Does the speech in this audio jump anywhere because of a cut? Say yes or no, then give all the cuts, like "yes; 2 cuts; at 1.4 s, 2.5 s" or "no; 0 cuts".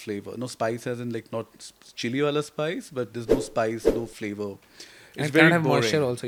no; 0 cuts